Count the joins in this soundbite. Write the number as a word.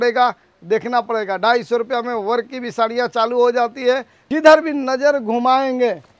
one